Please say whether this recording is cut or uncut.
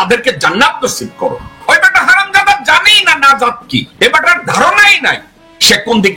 cut